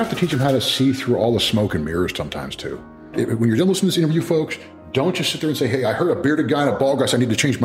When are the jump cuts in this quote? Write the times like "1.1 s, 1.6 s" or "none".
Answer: 3.1 s